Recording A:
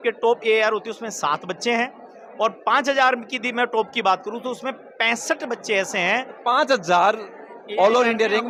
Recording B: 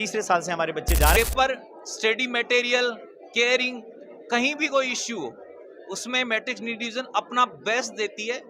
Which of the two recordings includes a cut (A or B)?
B